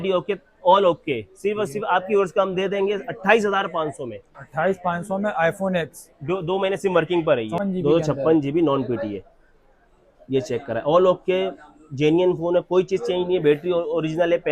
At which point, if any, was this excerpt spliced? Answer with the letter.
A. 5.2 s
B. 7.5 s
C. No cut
B